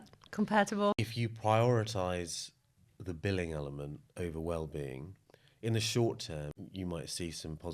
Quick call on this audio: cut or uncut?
cut